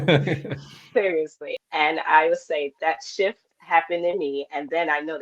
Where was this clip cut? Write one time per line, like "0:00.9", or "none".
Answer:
0:01.5
0:03.5